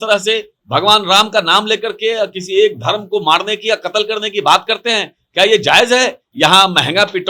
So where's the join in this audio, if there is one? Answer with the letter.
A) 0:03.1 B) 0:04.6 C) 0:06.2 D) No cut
C